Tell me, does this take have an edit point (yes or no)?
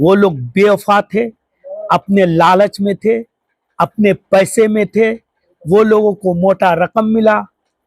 no